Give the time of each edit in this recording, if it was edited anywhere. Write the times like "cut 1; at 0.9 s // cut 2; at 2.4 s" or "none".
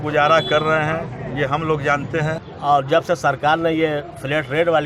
cut 1; at 2.4 s